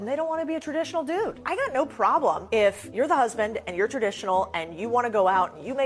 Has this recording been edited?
yes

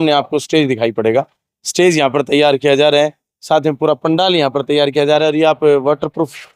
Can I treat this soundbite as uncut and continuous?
yes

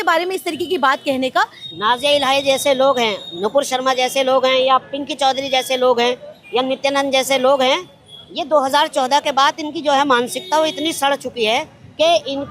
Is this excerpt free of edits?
no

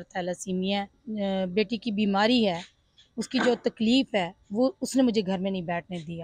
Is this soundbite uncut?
no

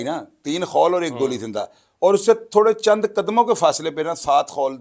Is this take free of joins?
yes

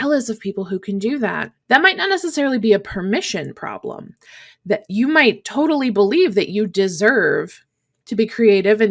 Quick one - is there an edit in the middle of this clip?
yes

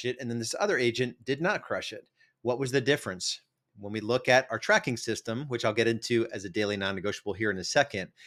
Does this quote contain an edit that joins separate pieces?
no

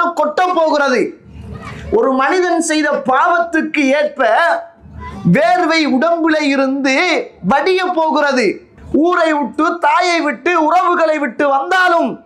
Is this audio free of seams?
no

